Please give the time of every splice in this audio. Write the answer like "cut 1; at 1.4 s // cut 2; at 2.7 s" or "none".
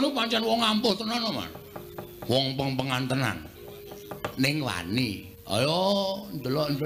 cut 1; at 3.4 s